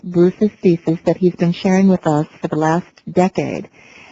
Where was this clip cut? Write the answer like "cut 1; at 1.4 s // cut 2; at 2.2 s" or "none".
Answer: cut 1; at 2.4 s

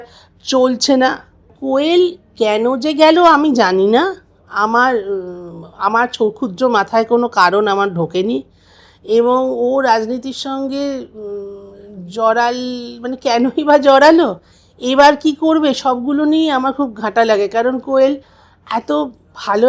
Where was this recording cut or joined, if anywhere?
cut 1; at 1.5 s

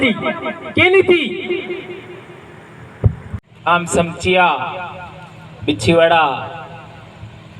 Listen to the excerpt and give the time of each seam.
cut 1; at 3.4 s

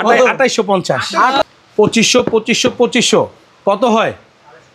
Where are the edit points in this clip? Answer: cut 1; at 1.4 s

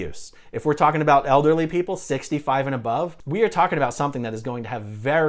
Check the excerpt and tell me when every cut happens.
cut 1; at 3.2 s

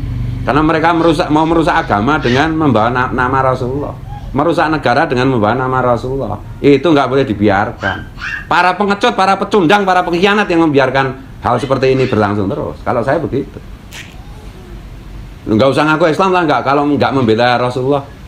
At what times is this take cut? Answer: none

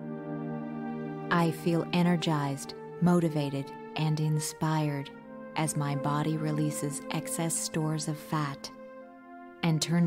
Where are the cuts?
cut 1; at 1.3 s

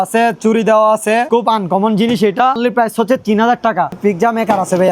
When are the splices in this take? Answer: cut 1; at 1.3 s // cut 2; at 2.6 s // cut 3; at 4.0 s

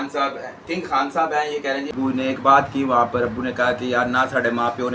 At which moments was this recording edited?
cut 1; at 1.9 s

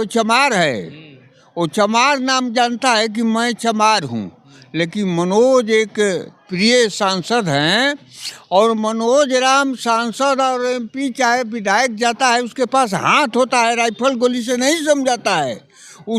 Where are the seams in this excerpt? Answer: none

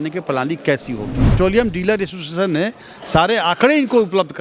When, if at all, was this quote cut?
cut 1; at 1.4 s

